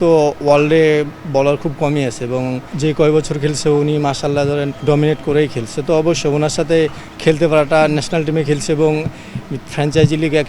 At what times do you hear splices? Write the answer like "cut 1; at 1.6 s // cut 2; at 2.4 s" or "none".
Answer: cut 1; at 2.8 s // cut 2; at 4.7 s

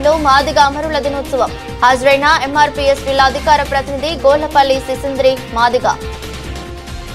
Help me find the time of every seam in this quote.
none

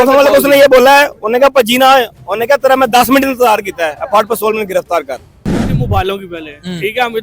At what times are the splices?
cut 1; at 5.7 s

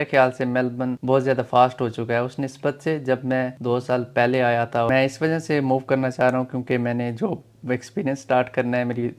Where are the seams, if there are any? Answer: cut 1; at 1.0 s // cut 2; at 3.6 s // cut 3; at 4.9 s

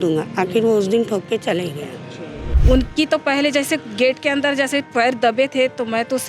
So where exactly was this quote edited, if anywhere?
cut 1; at 2.5 s

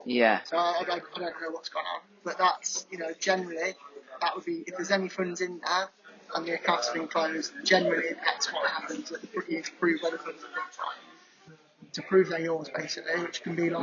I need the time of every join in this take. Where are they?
none

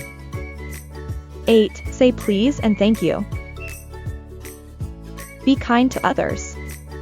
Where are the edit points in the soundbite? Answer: cut 1; at 1.1 s // cut 2; at 3.2 s // cut 3; at 5.0 s // cut 4; at 6.4 s

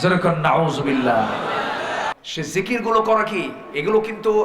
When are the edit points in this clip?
cut 1; at 2.1 s

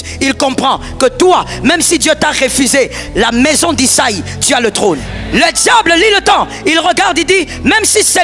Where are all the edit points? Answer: cut 1; at 5.1 s

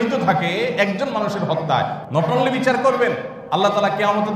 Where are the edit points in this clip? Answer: cut 1; at 2.0 s // cut 2; at 3.3 s

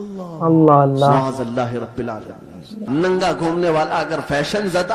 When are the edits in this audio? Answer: cut 1; at 2.8 s

